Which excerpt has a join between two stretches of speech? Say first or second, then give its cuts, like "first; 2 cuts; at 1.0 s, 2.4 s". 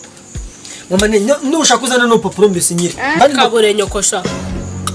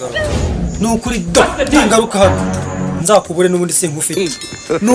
first; 1 cut; at 3.2 s